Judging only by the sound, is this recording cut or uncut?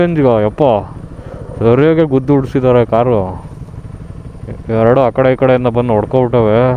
uncut